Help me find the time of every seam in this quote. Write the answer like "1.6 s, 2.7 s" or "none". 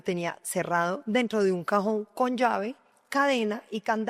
none